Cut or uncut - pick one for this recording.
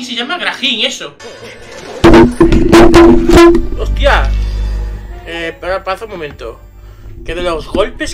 cut